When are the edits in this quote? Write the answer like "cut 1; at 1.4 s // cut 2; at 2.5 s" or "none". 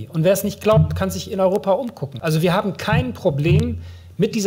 cut 1; at 2.0 s